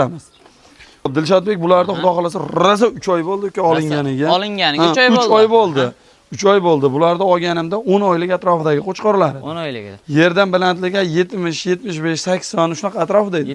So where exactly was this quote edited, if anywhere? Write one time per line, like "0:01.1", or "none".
0:01.1